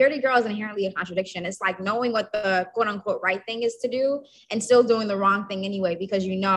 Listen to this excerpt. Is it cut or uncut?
uncut